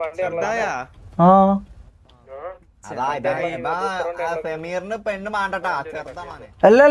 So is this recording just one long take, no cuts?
yes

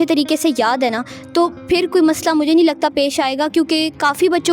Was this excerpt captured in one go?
yes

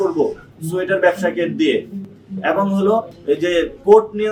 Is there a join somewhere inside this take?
no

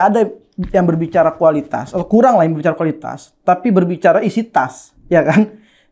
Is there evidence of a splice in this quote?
no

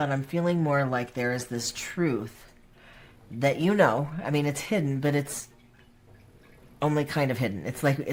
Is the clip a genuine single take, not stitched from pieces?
yes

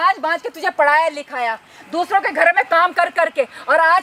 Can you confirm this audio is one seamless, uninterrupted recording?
yes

